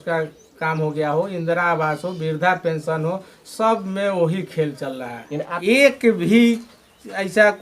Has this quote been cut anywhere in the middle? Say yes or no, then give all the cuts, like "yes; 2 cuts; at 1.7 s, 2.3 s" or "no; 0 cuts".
yes; 1 cut; at 5.5 s